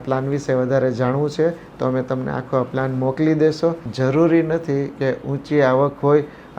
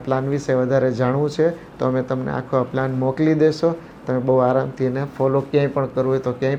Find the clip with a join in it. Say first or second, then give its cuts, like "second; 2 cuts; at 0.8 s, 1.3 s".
first; 1 cut; at 3.9 s